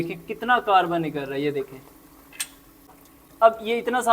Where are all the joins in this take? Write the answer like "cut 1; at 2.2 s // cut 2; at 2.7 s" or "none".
cut 1; at 2.9 s